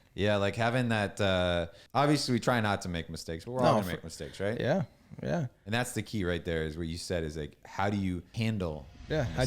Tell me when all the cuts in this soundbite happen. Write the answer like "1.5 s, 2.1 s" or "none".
1.8 s, 8.3 s